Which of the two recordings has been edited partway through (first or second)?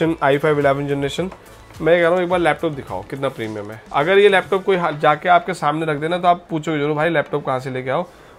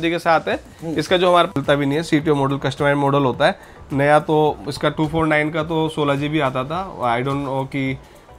second